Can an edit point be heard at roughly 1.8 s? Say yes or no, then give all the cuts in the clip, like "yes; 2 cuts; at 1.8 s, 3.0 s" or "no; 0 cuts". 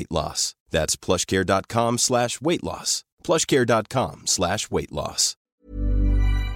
no; 1 cut; at 5.6 s